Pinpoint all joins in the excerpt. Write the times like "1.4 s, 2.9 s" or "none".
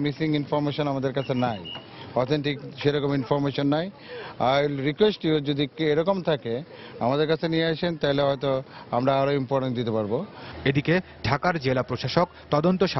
none

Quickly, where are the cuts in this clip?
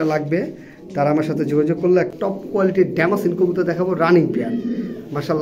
2.1 s

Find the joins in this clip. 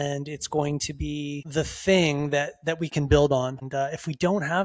1.4 s, 3.6 s

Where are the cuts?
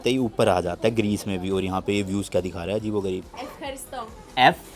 3.2 s

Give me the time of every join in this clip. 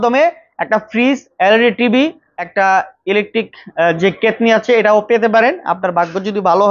2.6 s

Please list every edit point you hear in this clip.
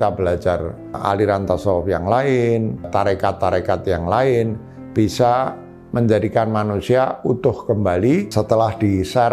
1.0 s, 2.9 s, 8.3 s

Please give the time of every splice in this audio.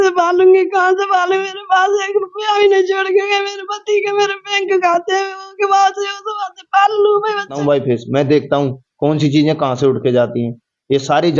7.6 s

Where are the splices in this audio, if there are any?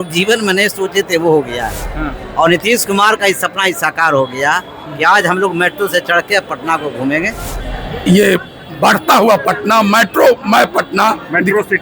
7.5 s

